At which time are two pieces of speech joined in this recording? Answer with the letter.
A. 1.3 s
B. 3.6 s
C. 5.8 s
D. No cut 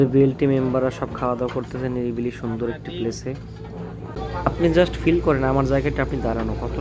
D